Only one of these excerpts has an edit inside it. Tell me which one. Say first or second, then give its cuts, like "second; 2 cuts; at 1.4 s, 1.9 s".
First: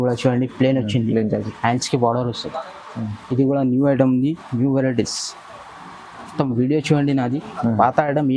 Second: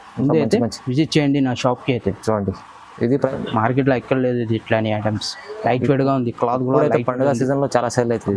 second; 1 cut; at 3.3 s